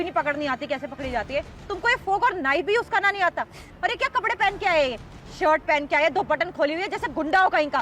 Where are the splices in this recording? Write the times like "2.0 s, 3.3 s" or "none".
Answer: 1.6 s